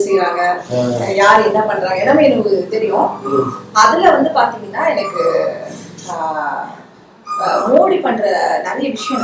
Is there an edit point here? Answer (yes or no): no